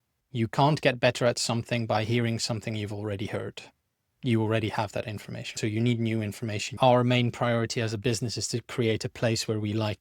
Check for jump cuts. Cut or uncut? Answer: cut